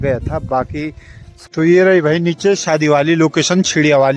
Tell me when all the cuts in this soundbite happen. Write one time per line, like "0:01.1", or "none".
0:01.3